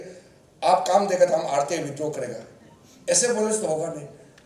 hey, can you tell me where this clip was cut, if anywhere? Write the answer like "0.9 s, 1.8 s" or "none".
none